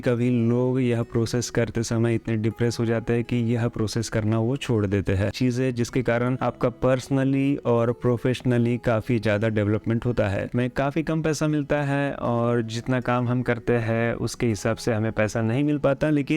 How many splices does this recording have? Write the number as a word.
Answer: two